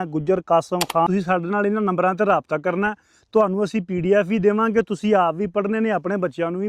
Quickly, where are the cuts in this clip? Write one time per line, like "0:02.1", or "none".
0:01.1